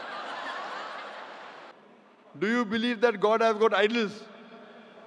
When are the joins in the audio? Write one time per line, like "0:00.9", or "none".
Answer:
0:01.7

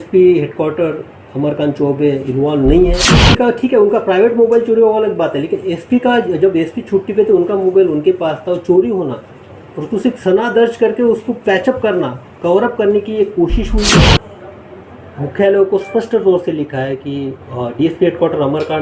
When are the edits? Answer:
0:03.2
0:14.1

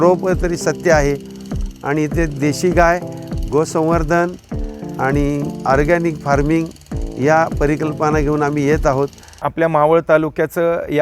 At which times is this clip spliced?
0:09.4

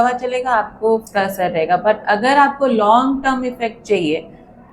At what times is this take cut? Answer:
0:01.1

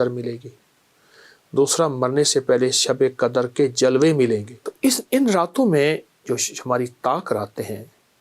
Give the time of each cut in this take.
0:04.5

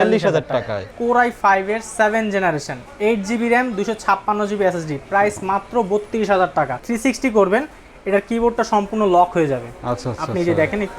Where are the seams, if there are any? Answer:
0:00.9
0:06.8

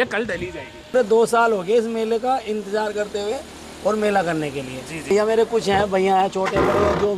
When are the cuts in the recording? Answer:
0:00.9
0:05.1

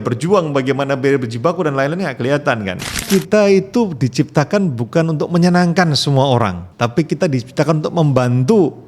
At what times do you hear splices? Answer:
0:03.1
0:06.6

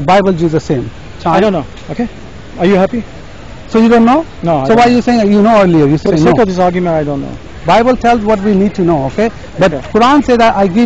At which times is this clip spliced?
0:01.2
0:06.0
0:07.4

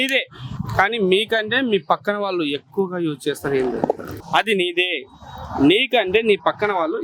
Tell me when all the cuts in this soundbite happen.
0:04.1

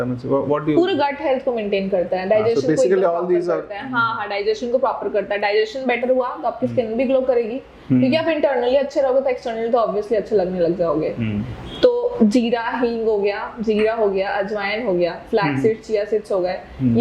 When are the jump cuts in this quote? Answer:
none

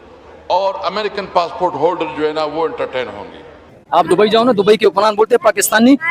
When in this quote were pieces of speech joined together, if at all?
0:03.7

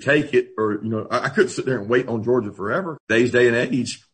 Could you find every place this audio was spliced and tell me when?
0:03.0

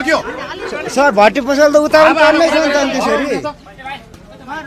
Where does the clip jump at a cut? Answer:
none

